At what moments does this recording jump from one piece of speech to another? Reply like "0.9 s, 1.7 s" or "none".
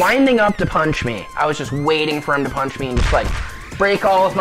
1.3 s